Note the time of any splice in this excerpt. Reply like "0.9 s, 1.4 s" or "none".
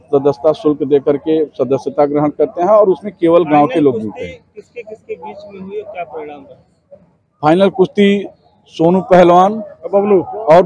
none